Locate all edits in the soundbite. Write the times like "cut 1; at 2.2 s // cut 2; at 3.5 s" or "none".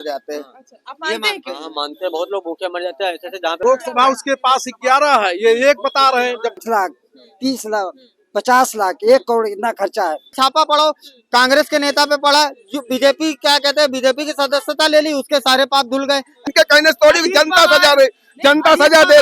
cut 1; at 3.6 s // cut 2; at 6.6 s // cut 3; at 10.4 s // cut 4; at 16.4 s